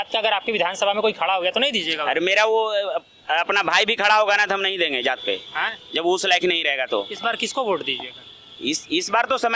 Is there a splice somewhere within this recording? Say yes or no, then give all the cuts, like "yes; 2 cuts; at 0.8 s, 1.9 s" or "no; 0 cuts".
no; 0 cuts